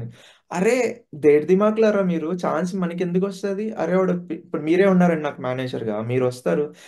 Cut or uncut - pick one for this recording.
uncut